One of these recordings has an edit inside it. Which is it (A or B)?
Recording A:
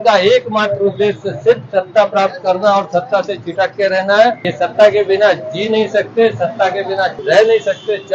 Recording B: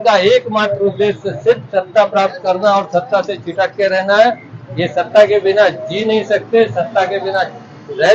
A